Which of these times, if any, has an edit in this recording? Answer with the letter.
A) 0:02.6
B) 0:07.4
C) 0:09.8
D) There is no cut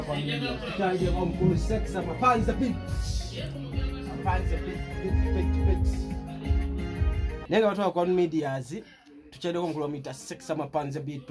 B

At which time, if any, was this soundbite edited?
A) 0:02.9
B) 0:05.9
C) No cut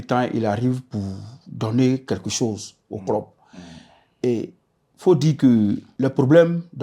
B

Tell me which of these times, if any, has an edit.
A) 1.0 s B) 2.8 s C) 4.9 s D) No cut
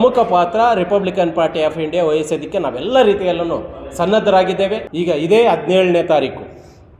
C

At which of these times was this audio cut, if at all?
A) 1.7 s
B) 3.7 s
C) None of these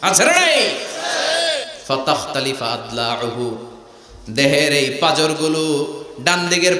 A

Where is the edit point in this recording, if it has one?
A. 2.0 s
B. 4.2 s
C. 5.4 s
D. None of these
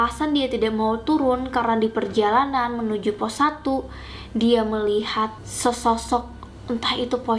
C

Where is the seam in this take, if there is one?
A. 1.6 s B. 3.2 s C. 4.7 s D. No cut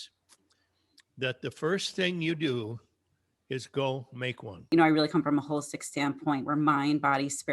C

